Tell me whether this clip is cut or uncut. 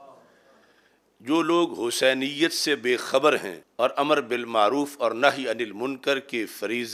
cut